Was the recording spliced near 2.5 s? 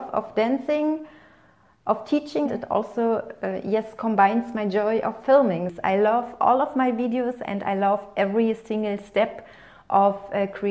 yes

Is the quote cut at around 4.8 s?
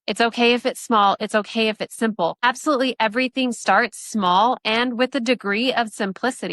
no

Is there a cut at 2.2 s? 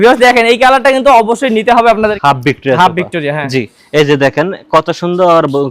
yes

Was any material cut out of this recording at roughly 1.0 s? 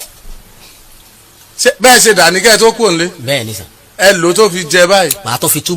yes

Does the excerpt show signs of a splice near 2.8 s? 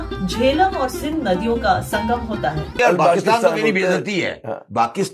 yes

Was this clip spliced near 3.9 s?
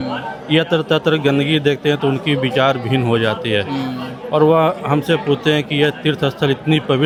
no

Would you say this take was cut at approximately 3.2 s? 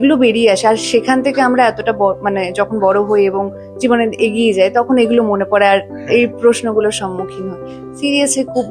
no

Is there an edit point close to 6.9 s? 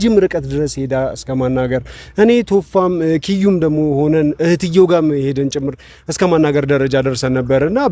no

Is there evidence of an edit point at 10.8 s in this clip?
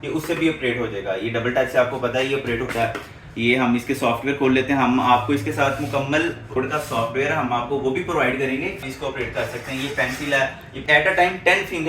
yes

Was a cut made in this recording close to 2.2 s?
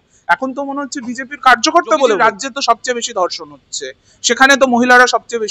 yes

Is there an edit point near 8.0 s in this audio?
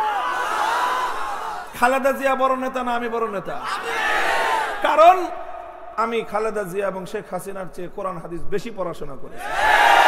no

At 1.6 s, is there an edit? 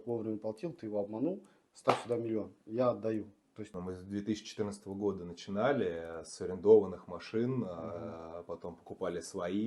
no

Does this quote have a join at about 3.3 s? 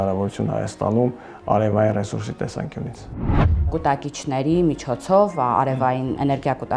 yes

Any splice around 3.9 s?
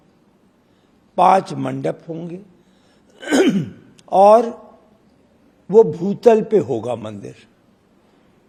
no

